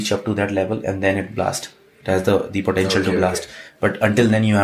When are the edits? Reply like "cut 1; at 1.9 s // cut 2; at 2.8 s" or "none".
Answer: none